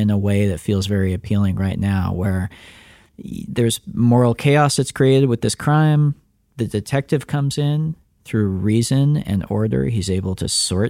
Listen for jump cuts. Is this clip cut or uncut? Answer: uncut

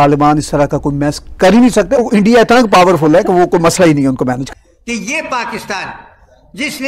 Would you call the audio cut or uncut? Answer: cut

